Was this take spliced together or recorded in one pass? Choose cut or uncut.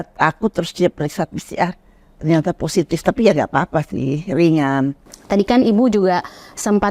uncut